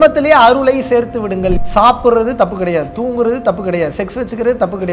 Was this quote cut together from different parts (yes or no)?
yes